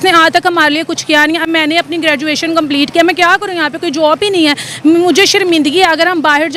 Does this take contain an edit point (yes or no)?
no